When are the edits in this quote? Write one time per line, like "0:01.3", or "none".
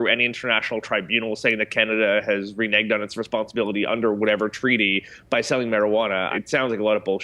0:06.3